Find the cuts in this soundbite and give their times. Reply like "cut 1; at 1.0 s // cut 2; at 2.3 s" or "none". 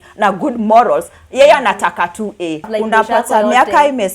cut 1; at 2.7 s